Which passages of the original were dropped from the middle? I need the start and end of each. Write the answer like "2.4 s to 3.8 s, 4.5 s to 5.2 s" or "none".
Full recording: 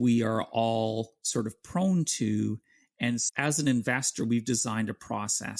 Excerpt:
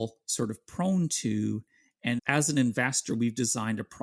3.2 s to 3.3 s